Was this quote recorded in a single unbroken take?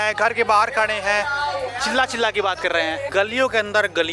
no; 2 cuts; at 1.7 s, 3.1 s

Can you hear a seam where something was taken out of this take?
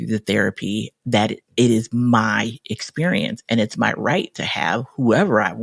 no; 0 cuts

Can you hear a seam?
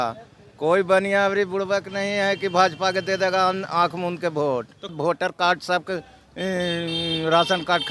no; 0 cuts

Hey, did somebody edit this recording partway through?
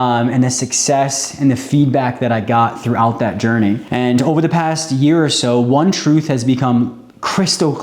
yes; 1 cut; at 3.8 s

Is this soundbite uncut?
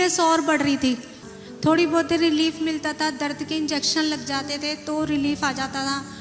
no; 1 cut; at 1.1 s

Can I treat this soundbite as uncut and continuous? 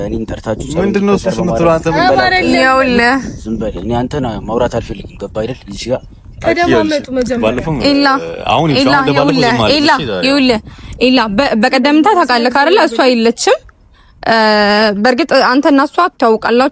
yes; 0 cuts

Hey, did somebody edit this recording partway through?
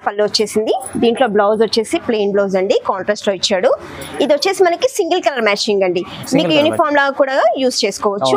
no; 0 cuts

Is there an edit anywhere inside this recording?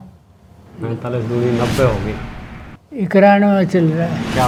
no; 0 cuts

